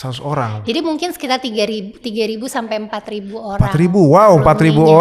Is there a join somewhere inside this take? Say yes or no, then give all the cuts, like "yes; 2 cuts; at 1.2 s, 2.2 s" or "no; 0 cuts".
no; 0 cuts